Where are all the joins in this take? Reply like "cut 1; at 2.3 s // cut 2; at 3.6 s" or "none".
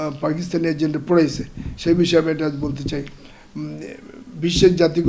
none